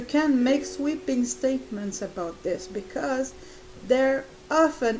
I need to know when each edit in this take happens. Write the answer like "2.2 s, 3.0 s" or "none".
none